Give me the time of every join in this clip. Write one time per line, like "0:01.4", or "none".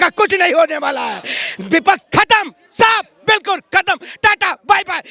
none